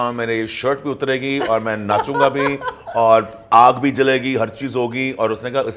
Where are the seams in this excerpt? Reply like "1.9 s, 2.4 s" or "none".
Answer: none